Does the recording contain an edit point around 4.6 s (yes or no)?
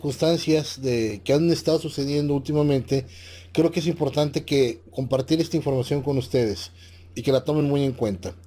yes